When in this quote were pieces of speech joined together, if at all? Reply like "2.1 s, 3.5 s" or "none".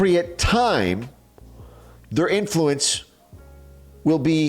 none